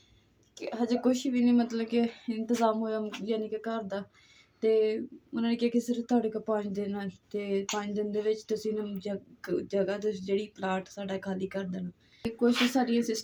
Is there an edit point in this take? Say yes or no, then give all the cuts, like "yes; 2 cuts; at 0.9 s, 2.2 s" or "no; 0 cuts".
yes; 1 cut; at 12.3 s